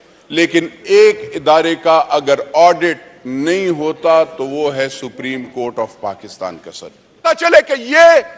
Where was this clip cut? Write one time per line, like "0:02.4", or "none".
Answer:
0:07.3

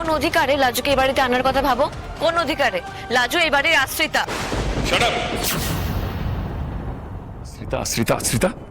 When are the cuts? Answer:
none

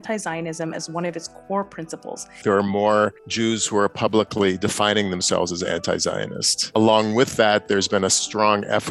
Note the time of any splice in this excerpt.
0:02.4
0:03.2
0:06.6

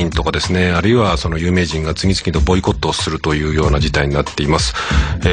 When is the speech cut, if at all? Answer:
0:01.9

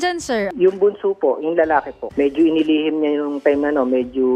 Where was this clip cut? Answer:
0:02.0

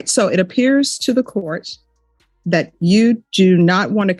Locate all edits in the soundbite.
none

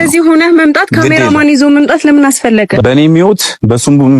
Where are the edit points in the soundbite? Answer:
0:02.8

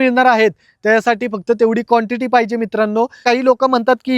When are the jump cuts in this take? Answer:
0:03.2

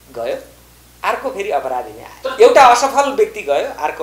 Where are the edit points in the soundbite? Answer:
0:02.1

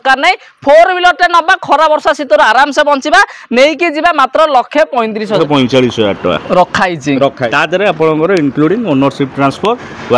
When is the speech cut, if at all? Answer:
0:05.4
0:07.4

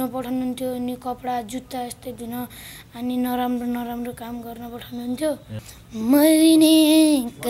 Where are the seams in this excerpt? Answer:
0:05.6

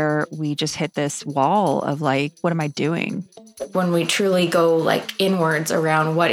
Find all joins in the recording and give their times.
0:02.3
0:03.5

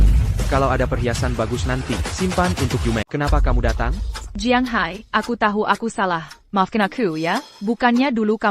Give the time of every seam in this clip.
0:03.1

